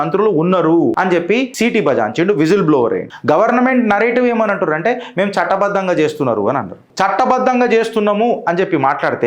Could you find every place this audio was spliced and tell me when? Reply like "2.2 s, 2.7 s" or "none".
1.3 s, 3.1 s, 6.9 s